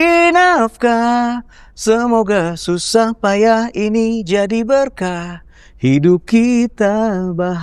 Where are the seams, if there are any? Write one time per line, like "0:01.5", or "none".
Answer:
none